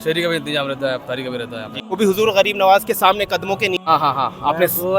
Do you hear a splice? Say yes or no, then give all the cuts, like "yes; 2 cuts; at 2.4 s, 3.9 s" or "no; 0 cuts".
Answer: yes; 2 cuts; at 1.8 s, 3.8 s